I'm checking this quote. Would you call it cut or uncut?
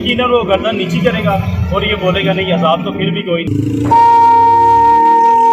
cut